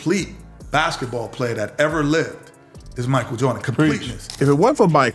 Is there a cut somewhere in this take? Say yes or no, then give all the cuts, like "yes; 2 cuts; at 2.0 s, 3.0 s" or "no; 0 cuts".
yes; 1 cut; at 4.2 s